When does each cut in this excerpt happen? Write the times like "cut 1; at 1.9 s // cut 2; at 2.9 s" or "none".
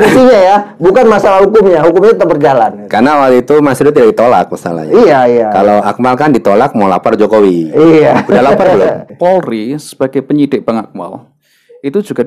cut 1; at 9.0 s